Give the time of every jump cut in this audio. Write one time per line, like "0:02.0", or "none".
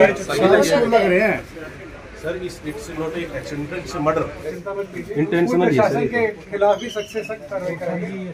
0:04.4